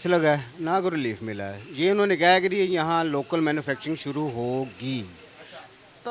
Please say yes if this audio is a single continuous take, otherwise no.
yes